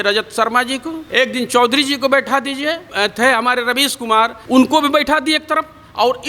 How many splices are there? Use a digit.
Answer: 3